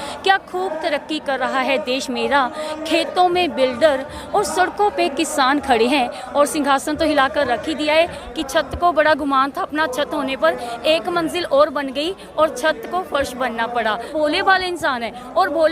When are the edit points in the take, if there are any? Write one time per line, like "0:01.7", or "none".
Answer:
0:06.2
0:08.2
0:14.1